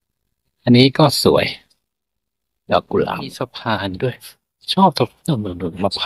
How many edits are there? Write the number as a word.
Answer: one